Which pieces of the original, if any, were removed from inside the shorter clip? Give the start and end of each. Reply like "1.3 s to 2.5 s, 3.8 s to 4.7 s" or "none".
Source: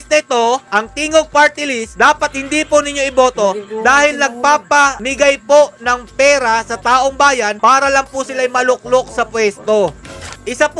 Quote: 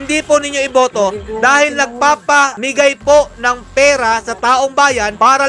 none